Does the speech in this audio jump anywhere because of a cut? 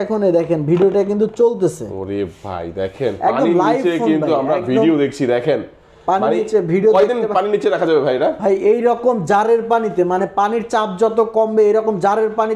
no; 0 cuts

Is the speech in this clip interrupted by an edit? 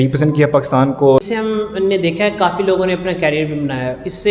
yes; 1 cut; at 1.2 s

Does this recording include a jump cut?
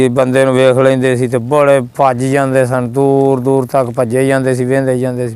no; 0 cuts

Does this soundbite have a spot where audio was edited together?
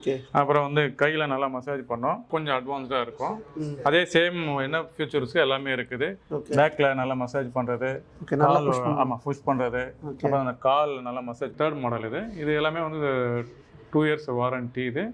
yes; 2 cuts; at 2.3 s, 11.5 s

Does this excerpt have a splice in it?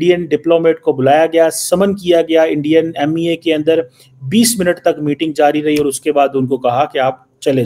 no; 0 cuts

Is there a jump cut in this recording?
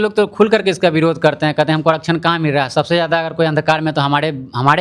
no; 0 cuts

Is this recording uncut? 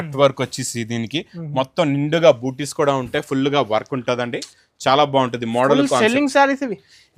yes; 0 cuts

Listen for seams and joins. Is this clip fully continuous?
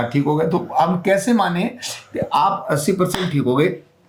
yes; 0 cuts

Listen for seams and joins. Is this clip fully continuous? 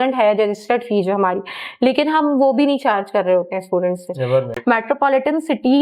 no; 1 cut; at 4.5 s

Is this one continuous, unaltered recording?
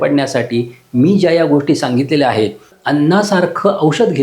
no; 1 cut; at 2.7 s

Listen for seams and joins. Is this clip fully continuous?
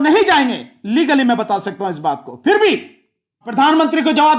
no; 1 cut; at 3.5 s

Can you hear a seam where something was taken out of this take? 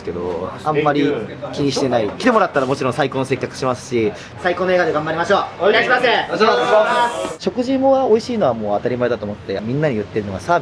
yes; 4 cuts; at 2.1 s, 4.4 s, 7.3 s, 9.6 s

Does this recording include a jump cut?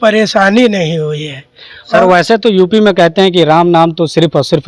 no; 0 cuts

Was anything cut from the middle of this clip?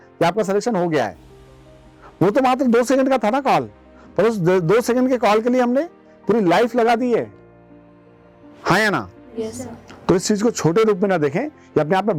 no; 0 cuts

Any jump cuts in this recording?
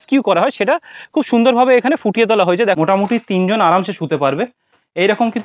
yes; 1 cut; at 2.8 s

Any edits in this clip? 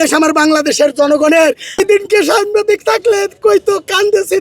yes; 1 cut; at 1.8 s

